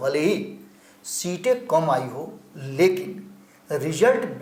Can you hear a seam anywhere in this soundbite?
no; 0 cuts

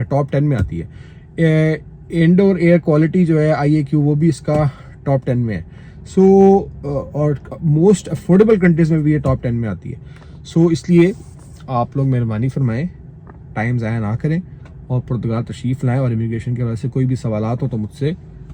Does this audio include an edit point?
no; 0 cuts

